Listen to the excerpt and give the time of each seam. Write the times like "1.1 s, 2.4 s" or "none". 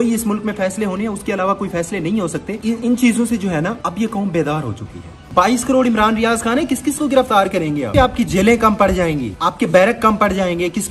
2.5 s, 3.8 s, 5.3 s, 7.9 s, 9.3 s